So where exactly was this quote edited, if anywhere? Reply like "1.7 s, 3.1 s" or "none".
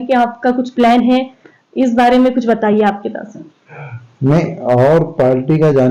none